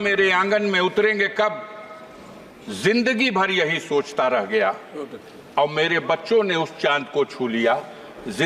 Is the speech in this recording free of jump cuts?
yes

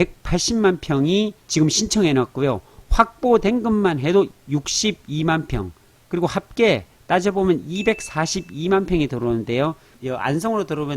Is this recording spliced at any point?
yes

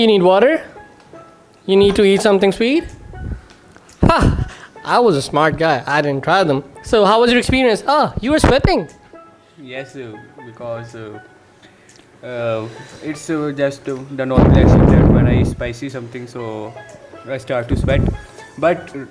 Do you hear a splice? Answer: no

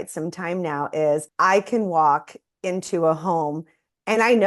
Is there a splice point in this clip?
yes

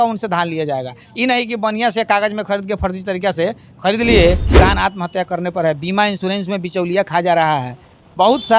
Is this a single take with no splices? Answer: no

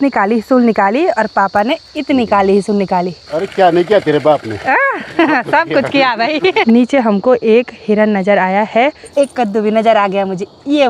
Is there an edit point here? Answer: yes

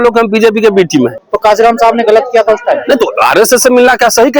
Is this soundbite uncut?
no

